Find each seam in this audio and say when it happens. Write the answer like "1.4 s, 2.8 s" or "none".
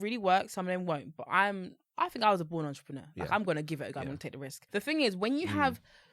4.6 s